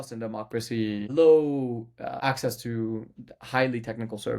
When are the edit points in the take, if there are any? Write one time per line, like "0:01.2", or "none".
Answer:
0:01.1
0:02.2